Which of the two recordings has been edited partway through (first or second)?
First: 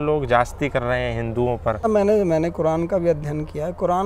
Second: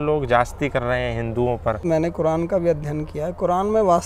second